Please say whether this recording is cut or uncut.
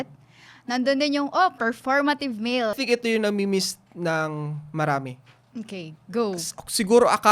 cut